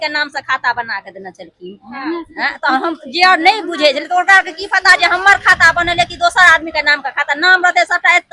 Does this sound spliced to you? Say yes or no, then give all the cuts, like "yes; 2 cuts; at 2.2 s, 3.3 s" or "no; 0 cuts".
no; 0 cuts